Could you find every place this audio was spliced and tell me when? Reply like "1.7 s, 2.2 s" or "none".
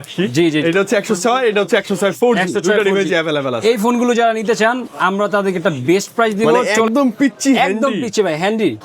6.9 s